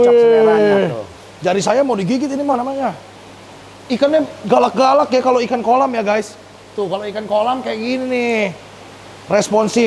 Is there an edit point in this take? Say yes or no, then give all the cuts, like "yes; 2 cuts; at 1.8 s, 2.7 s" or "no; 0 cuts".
no; 0 cuts